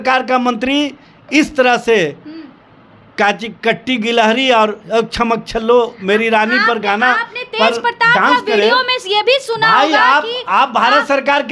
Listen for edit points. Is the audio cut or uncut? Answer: uncut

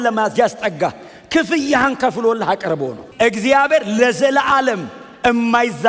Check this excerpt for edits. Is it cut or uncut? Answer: cut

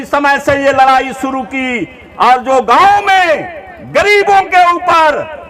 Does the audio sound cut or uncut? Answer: uncut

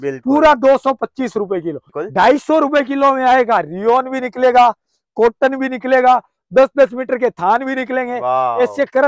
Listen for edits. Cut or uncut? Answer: cut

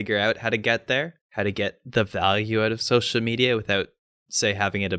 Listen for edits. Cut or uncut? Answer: cut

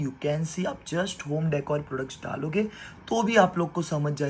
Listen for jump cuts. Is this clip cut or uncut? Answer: uncut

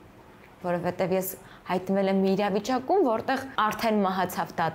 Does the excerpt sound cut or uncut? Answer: cut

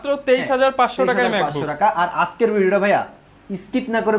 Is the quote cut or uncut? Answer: uncut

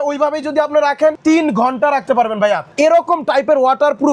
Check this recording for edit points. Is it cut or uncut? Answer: cut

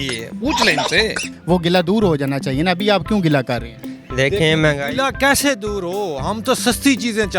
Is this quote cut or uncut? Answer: cut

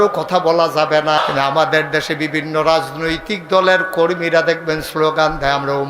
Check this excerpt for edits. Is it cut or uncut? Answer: cut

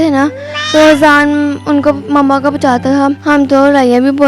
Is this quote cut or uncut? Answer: cut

